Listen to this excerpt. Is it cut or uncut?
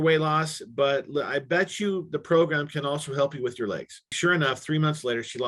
cut